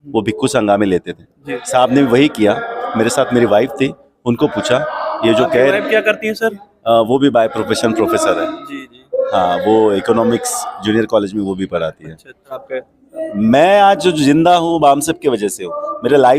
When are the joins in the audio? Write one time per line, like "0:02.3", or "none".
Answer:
0:12.6